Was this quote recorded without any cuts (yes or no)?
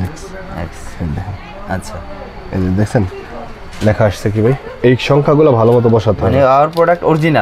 yes